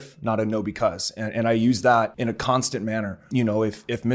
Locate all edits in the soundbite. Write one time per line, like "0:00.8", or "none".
0:02.1
0:03.2